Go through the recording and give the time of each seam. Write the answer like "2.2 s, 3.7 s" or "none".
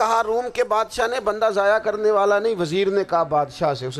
none